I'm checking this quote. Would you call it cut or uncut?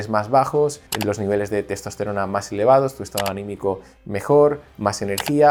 uncut